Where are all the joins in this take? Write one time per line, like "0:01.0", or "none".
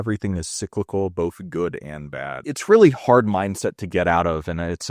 0:02.5

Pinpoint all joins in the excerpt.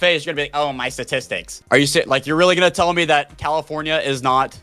0:01.5

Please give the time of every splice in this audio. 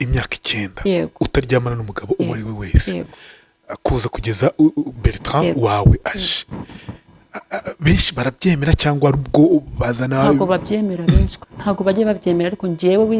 0:11.4

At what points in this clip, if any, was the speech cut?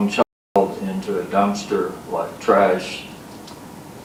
none

